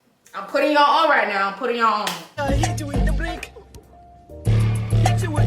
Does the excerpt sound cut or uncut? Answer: cut